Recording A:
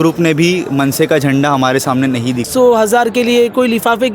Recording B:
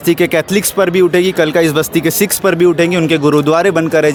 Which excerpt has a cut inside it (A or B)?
A